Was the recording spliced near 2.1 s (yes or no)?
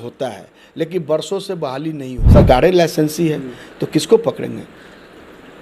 yes